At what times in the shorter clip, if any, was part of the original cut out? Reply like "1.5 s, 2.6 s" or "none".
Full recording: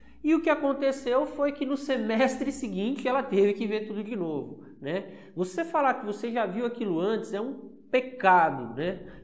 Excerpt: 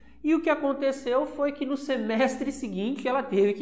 none